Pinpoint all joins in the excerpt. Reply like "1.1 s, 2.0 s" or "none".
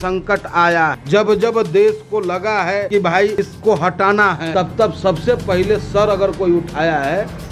1.0 s, 3.1 s, 4.4 s

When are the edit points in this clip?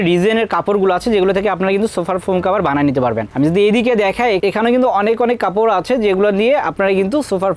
none

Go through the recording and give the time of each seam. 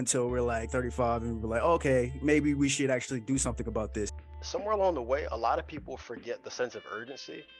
4.1 s

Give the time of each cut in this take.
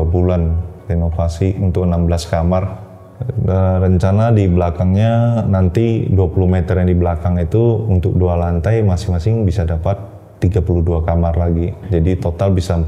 none

